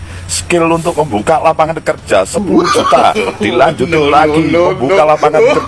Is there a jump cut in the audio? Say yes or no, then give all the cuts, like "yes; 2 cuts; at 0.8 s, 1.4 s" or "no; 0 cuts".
no; 0 cuts